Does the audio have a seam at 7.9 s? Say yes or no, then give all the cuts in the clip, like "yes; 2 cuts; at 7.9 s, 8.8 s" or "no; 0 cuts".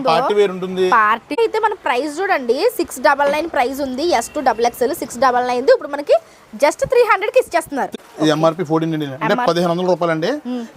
yes; 2 cuts; at 1.4 s, 7.9 s